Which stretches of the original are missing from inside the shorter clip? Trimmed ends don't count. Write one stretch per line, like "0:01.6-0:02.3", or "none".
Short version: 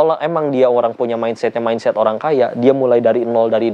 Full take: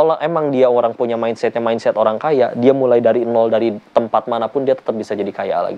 none